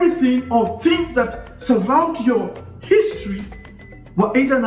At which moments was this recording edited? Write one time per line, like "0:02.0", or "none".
none